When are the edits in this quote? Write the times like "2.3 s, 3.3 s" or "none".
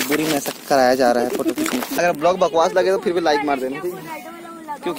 1.9 s